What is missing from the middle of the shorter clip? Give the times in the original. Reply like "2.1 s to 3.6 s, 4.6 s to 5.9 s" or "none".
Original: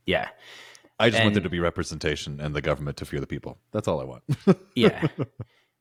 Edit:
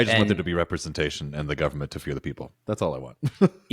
none